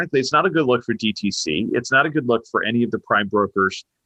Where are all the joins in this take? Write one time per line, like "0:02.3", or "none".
none